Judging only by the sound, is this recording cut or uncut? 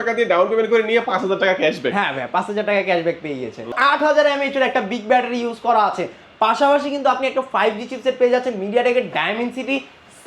cut